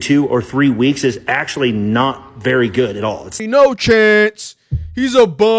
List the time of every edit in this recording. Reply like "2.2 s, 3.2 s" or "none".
3.4 s